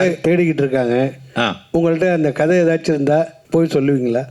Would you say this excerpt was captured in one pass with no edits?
no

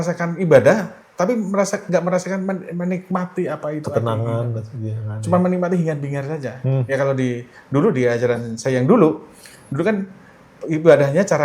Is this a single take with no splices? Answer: yes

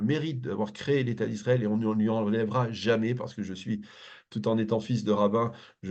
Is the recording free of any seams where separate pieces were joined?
yes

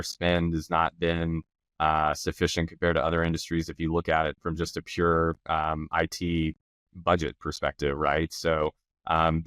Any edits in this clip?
no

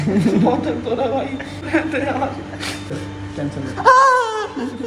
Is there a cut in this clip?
yes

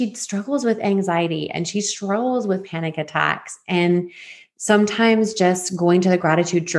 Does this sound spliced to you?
no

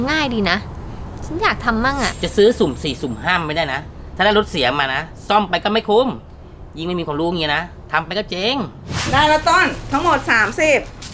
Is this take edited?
yes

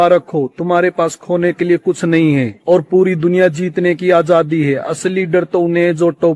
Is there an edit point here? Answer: no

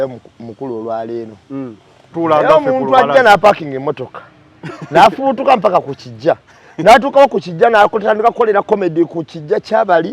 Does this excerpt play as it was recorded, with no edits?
no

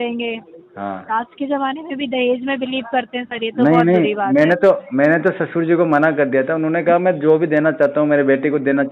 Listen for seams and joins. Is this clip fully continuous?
yes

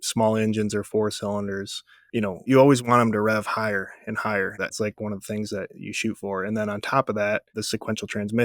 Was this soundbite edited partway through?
yes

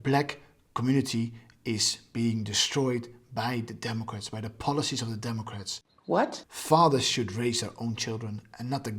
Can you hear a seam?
yes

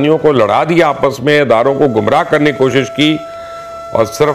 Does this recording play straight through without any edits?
yes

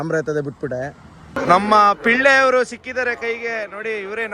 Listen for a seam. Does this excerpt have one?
yes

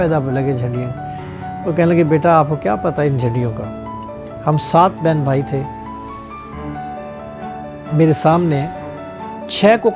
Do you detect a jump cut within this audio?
no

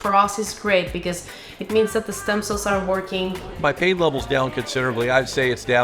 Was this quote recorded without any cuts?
no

